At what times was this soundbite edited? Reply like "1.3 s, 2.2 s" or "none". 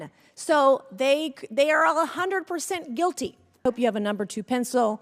3.6 s